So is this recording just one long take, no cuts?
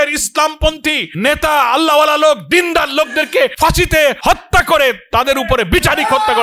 no; 2 cuts; at 1.1 s, 3.9 s

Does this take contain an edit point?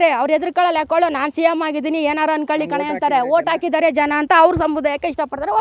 no; 0 cuts

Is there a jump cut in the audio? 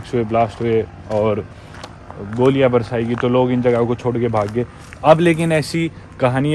no; 0 cuts

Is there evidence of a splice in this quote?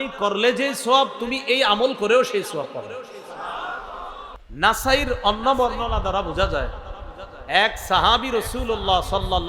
yes; 1 cut; at 4.3 s

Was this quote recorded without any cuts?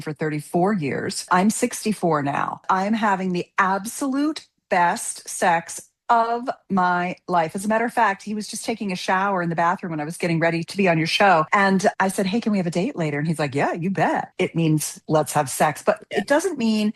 no; 4 cuts; at 1.3 s, 2.6 s, 11.5 s, 14.3 s

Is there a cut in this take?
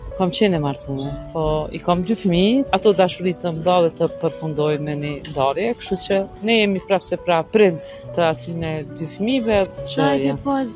yes; 5 cuts; at 1.2 s, 2.7 s, 6.3 s, 7.5 s, 9.7 s

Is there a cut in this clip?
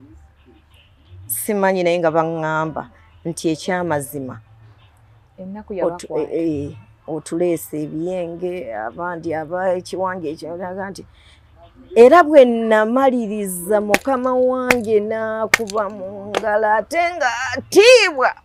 no; 0 cuts

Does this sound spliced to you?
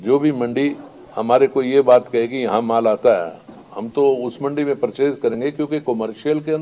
no; 0 cuts

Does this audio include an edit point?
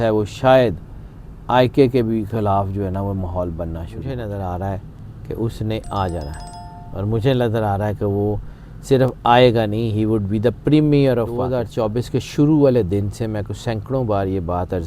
yes; 2 cuts; at 4.1 s, 11.6 s

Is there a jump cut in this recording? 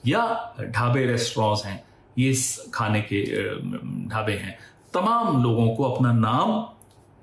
no; 0 cuts

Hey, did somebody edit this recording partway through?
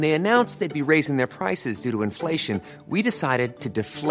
no; 0 cuts

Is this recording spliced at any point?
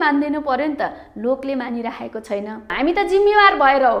yes; 1 cut; at 2.7 s

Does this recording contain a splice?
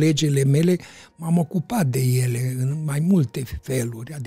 no; 0 cuts

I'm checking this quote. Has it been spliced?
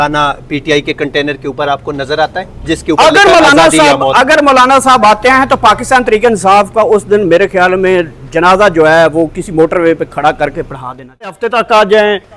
yes; 1 cut; at 11.4 s

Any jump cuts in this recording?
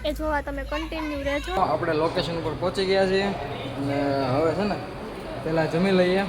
yes; 1 cut; at 1.6 s

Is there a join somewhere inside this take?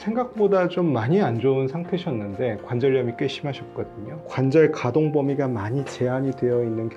yes; 1 cut; at 4.2 s

